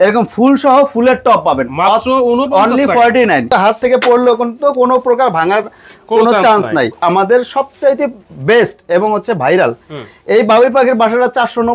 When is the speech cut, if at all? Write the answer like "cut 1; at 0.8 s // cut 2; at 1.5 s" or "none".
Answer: cut 1; at 3.5 s // cut 2; at 7.0 s